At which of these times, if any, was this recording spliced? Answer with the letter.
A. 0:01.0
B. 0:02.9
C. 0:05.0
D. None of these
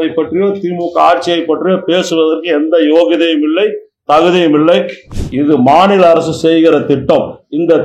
C